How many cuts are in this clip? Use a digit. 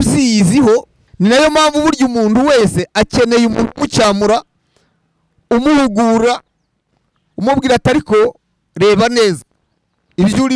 1